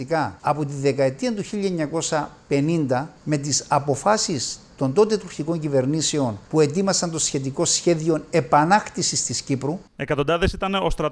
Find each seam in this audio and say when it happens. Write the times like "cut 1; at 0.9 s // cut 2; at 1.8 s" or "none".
cut 1; at 9.9 s